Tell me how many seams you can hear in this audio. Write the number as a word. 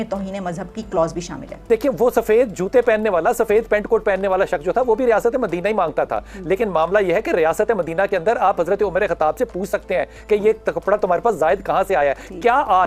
one